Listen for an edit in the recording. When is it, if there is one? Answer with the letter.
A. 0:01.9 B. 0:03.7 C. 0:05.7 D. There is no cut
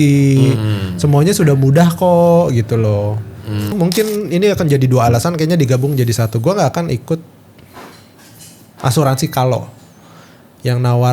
B